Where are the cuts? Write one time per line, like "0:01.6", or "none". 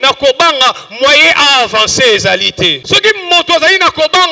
0:02.8